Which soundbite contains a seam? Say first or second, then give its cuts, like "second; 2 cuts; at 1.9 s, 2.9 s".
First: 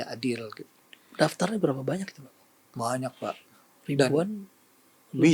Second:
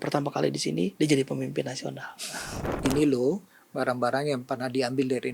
second; 2 cuts; at 0.9 s, 2.6 s